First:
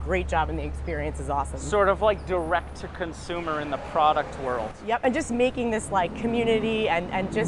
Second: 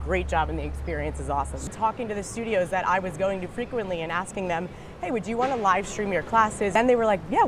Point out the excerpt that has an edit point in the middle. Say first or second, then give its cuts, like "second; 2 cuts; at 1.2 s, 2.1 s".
second; 2 cuts; at 1.7 s, 6.7 s